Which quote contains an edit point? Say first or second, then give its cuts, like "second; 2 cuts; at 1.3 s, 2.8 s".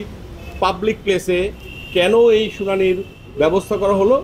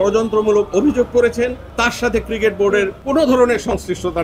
second; 2 cuts; at 1.7 s, 3.0 s